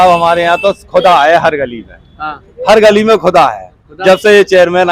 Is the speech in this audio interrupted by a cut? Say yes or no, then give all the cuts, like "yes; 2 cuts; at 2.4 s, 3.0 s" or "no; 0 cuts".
no; 0 cuts